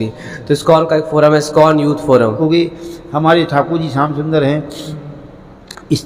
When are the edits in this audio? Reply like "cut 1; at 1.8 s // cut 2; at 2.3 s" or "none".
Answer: cut 1; at 2.4 s

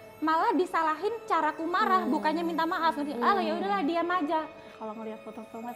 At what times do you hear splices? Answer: cut 1; at 4.7 s

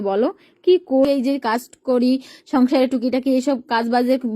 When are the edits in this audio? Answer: cut 1; at 1.1 s

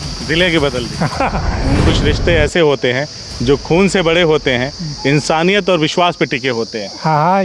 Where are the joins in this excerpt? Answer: cut 1; at 1.8 s

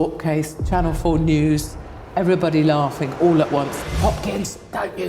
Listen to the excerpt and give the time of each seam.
cut 1; at 3.9 s

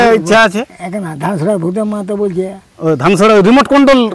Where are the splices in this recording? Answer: none

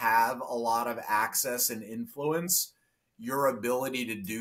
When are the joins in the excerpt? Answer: none

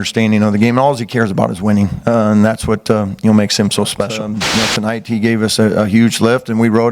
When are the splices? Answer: cut 1; at 4.2 s

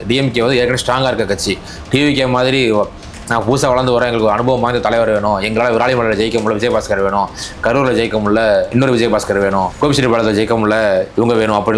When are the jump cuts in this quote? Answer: none

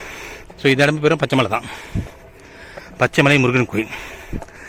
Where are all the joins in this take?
none

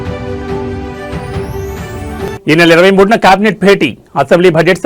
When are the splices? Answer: cut 1; at 1.8 s

